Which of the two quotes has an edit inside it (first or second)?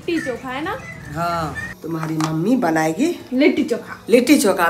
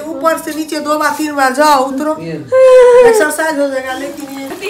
first